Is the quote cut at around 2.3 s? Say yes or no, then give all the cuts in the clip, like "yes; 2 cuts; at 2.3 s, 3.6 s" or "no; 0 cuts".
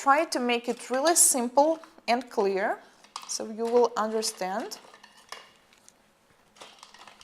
yes; 1 cut; at 2.3 s